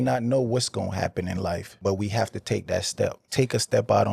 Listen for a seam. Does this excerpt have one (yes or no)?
yes